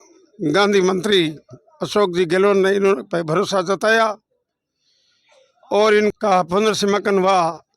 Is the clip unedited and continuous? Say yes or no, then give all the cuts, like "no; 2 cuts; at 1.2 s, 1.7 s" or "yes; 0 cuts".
no; 1 cut; at 6.1 s